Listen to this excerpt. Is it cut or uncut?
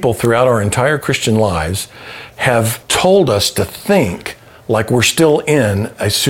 cut